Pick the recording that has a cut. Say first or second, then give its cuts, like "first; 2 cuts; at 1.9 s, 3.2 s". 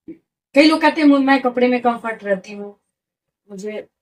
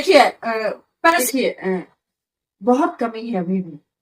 second; 1 cut; at 1.3 s